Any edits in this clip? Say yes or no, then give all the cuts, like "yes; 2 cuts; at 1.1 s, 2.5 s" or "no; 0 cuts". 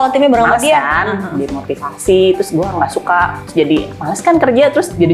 no; 0 cuts